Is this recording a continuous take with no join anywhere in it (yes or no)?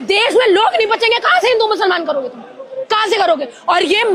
yes